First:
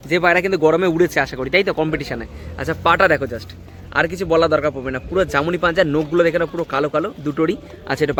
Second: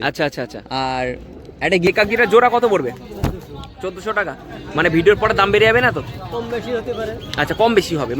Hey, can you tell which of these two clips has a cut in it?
second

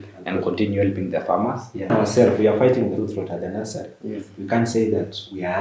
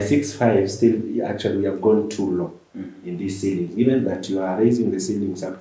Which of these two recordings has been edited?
first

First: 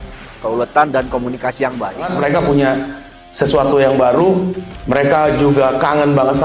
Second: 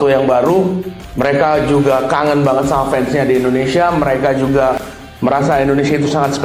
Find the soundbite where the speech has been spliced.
first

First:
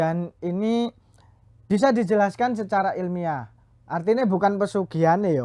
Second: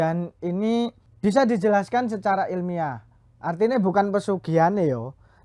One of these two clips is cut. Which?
second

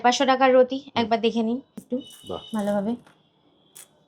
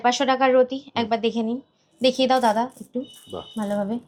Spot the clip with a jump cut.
first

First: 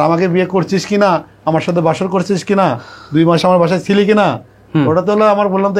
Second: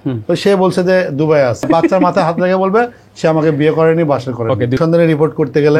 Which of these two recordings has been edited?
second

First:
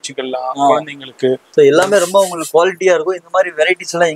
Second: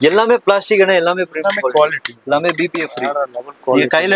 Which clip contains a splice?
first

